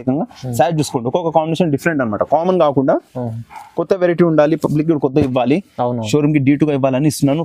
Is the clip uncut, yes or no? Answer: yes